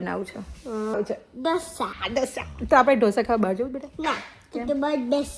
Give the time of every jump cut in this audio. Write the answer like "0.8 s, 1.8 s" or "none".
0.9 s, 2.0 s